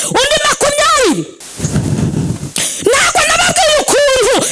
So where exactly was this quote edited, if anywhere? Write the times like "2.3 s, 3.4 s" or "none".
1.4 s

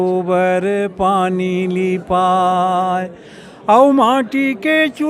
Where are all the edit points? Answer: none

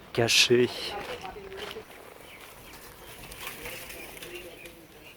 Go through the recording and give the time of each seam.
none

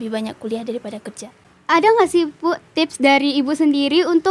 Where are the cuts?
1.5 s

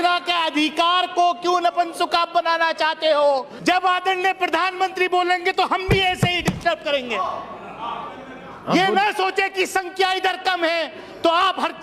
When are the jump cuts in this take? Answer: 3.5 s

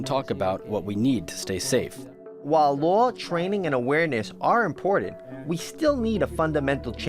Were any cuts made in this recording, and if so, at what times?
2.4 s

